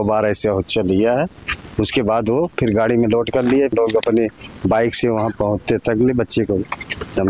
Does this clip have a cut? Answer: yes; 1 cut; at 3.7 s

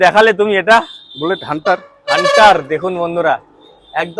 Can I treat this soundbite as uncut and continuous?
yes; 0 cuts

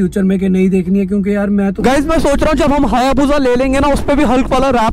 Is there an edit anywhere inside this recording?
yes; 1 cut; at 1.8 s

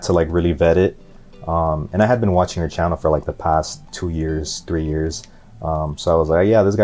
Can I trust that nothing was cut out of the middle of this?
yes; 0 cuts

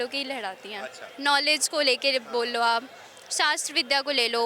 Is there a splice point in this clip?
no; 0 cuts

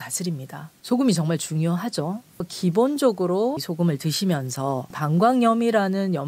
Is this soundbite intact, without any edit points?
yes; 0 cuts

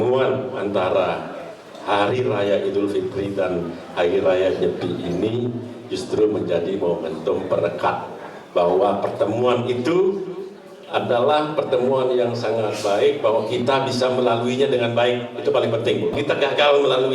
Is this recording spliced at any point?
yes; 1 cut; at 16.1 s

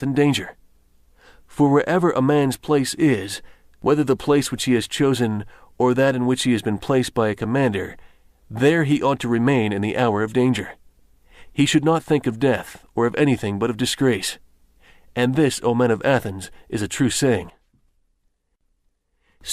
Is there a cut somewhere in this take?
no; 0 cuts

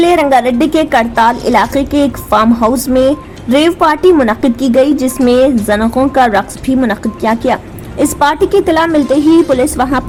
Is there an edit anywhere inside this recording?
no; 0 cuts

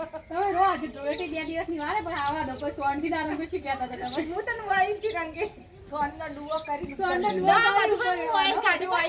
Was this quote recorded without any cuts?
yes; 0 cuts

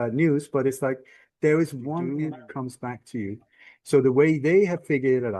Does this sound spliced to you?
yes; 1 cut; at 2.0 s

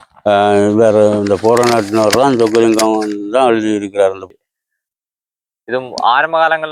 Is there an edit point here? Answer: yes; 1 cut; at 4.3 s

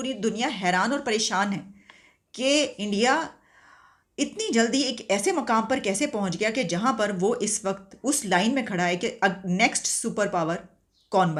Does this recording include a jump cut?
no; 0 cuts

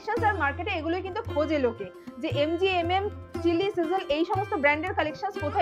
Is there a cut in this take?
no; 0 cuts

